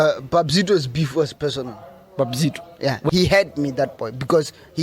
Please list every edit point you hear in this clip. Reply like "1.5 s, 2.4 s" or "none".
3.1 s